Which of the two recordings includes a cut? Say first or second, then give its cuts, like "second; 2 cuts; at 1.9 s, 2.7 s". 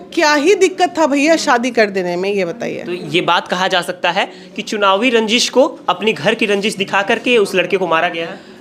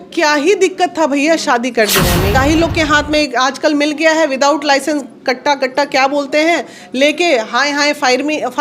second; 1 cut; at 2.4 s